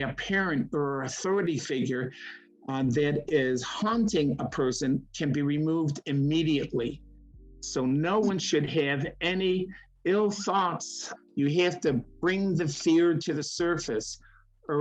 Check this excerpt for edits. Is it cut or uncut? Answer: cut